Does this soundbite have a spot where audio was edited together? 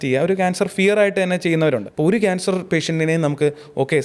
yes; 1 cut; at 1.9 s

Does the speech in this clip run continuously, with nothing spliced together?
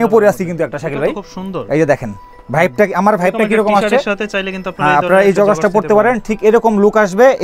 yes; 0 cuts

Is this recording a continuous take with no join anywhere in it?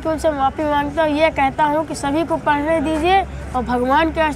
yes; 0 cuts

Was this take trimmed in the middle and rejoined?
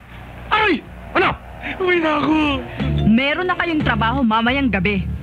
yes; 1 cut; at 2.7 s

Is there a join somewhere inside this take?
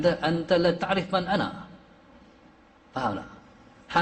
no; 0 cuts

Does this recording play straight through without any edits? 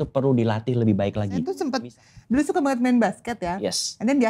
no; 1 cut; at 1.5 s

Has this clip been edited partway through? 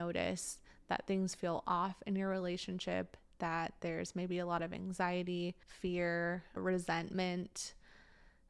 yes; 2 cuts; at 5.7 s, 6.5 s

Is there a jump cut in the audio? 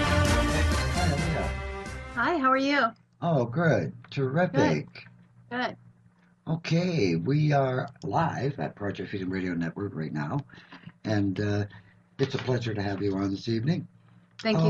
no; 0 cuts

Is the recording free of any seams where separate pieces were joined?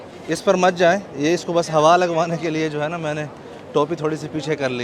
yes; 0 cuts

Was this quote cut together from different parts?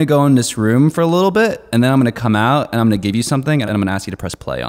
yes; 1 cut; at 3.6 s

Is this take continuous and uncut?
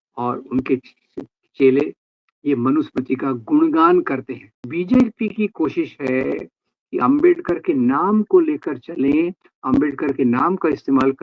no; 1 cut; at 4.7 s

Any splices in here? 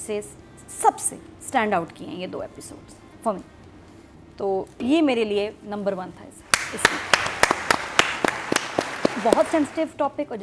no; 0 cuts

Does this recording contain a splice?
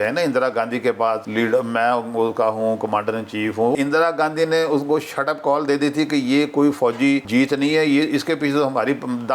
yes; 3 cuts; at 1.2 s, 3.7 s, 7.2 s

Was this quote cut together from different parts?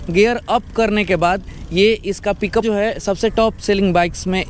yes; 1 cut; at 2.6 s

